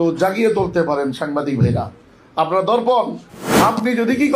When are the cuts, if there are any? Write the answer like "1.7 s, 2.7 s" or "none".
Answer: 3.4 s